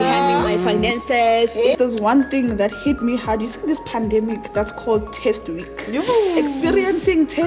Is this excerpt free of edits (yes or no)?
no